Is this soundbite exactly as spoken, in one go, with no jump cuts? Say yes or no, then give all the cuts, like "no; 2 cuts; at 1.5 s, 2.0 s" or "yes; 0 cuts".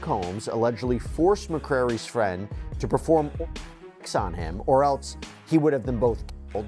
yes; 0 cuts